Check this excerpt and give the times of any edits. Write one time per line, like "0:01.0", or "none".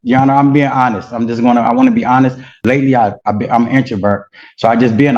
0:02.5